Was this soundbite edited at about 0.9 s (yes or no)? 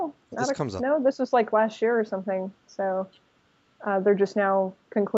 no